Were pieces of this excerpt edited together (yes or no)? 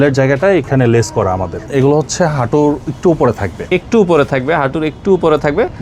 yes